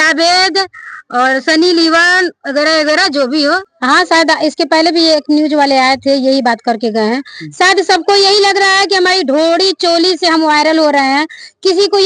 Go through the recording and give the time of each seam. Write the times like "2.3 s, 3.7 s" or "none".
3.7 s